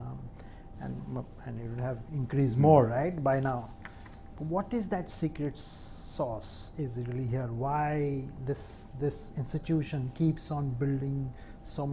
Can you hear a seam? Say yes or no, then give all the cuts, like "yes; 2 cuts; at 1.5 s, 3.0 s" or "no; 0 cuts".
no; 0 cuts